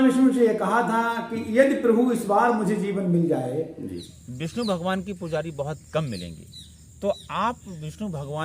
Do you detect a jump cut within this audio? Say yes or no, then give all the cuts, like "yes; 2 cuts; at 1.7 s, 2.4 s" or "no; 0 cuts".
yes; 1 cut; at 4.0 s